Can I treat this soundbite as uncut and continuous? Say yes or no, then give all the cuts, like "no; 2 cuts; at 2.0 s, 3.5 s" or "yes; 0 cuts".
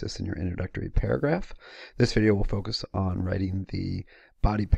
yes; 0 cuts